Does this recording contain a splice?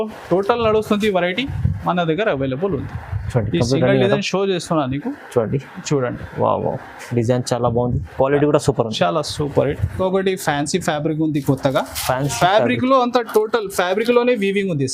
yes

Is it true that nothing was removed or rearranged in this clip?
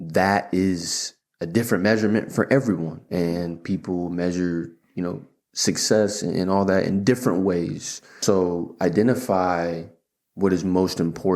no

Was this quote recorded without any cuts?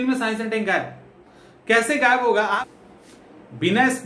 no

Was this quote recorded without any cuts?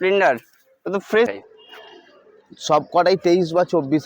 no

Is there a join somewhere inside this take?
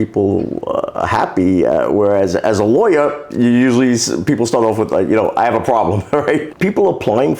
yes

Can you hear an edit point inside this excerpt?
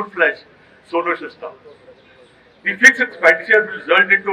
no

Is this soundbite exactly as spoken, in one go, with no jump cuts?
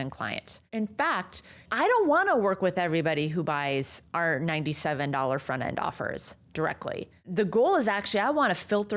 no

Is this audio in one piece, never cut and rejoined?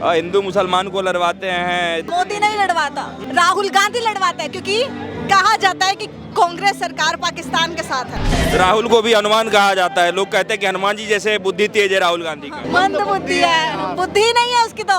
no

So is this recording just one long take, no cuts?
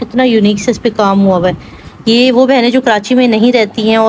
yes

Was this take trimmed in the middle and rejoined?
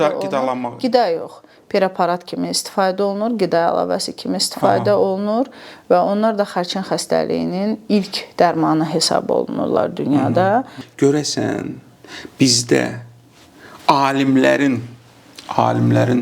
yes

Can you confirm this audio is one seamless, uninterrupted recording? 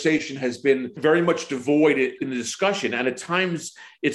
no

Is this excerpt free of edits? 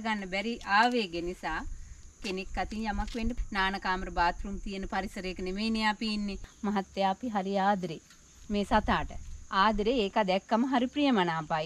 no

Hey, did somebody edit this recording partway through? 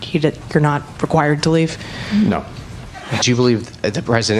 yes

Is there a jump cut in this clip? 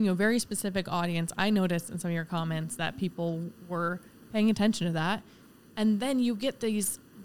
no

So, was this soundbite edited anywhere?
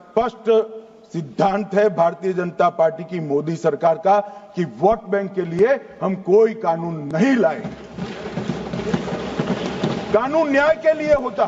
no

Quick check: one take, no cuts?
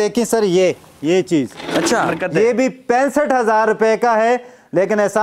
no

